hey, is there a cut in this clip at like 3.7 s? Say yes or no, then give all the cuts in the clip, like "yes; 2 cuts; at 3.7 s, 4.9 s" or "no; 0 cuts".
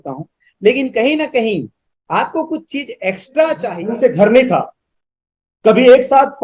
yes; 1 cut; at 3.7 s